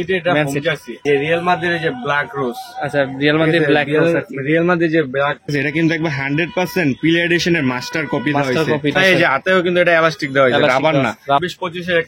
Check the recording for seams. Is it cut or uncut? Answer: cut